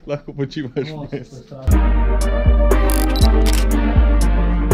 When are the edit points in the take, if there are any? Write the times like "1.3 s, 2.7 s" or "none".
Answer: none

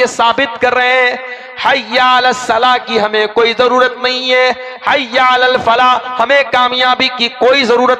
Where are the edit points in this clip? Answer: none

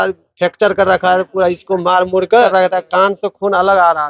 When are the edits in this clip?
2.5 s

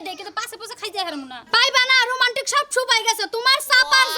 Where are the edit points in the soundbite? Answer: 1.4 s

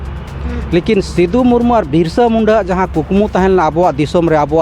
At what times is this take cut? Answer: none

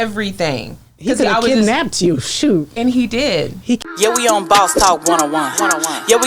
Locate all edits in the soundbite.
3.8 s

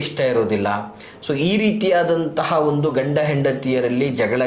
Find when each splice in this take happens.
none

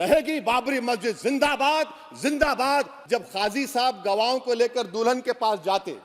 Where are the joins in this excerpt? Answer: 3.0 s

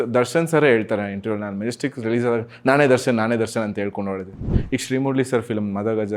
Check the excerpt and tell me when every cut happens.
4.5 s

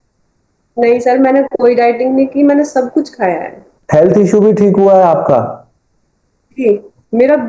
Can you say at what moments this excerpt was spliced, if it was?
3.8 s

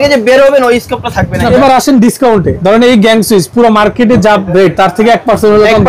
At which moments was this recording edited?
1.5 s, 2.5 s

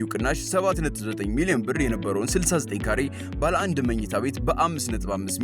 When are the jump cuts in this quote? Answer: none

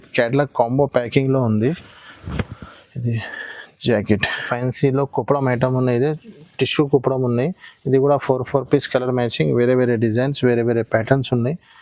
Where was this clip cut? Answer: 4.5 s

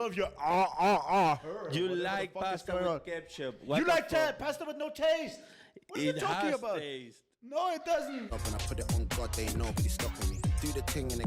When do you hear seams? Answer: 8.3 s

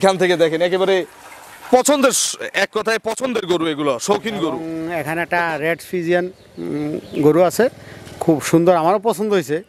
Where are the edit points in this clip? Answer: 4.7 s

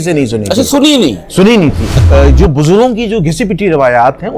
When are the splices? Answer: 2.0 s

